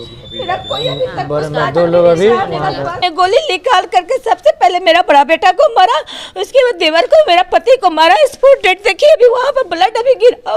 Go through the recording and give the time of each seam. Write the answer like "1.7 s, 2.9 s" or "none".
3.0 s